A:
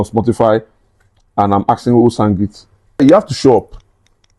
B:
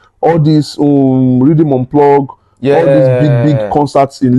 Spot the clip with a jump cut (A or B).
A